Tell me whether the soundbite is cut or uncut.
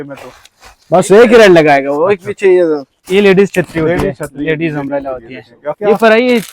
cut